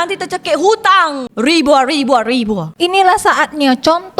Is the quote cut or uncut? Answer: cut